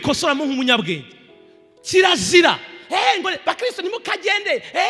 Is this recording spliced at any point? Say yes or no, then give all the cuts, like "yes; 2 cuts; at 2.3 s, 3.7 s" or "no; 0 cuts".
no; 0 cuts